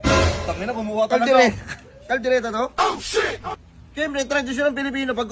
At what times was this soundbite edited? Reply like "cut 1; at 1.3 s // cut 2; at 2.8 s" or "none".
cut 1; at 3.5 s